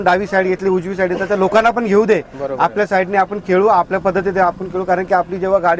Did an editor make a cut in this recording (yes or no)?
no